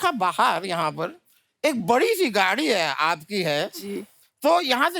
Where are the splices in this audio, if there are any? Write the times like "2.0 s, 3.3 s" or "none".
none